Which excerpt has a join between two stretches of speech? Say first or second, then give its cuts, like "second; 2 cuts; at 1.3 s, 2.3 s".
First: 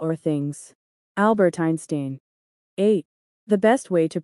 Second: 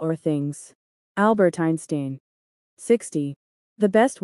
first; 1 cut; at 2.9 s